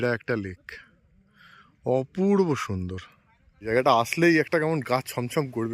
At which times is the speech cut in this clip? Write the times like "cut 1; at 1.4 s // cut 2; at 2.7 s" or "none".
cut 1; at 3.6 s